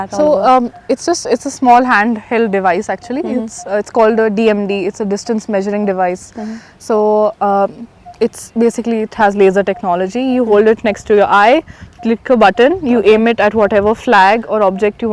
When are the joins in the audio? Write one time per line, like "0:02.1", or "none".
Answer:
none